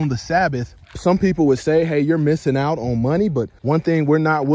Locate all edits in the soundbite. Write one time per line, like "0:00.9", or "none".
0:00.9
0:03.5